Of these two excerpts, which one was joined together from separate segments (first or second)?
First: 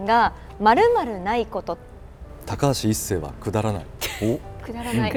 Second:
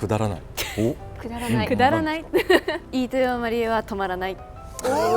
second